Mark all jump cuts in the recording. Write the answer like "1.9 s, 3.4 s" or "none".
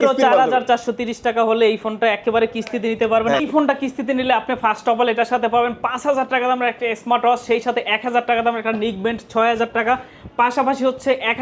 3.4 s